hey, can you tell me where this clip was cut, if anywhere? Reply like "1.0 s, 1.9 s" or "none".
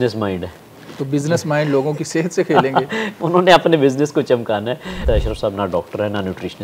5.0 s